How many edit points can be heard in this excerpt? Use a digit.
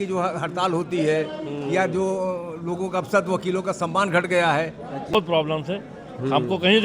1